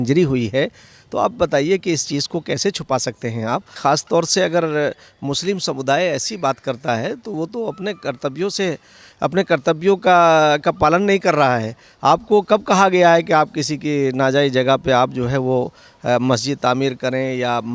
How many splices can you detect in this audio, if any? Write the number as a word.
one